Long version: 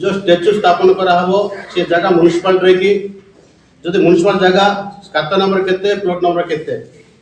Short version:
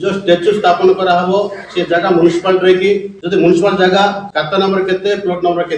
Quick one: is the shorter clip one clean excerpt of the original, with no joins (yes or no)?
no